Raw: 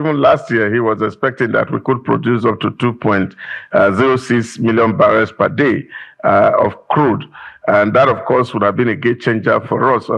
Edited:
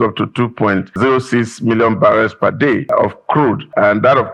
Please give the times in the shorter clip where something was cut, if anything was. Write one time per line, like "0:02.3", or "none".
0:01.0
0:03.2